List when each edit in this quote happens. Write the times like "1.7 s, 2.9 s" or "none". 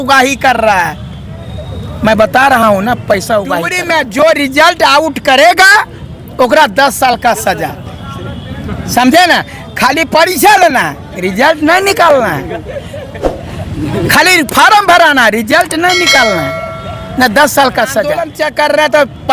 3.8 s, 18.3 s